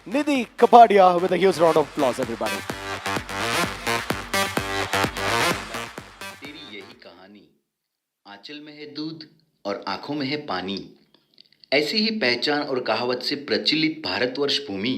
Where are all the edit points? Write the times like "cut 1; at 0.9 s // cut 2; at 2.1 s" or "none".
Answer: none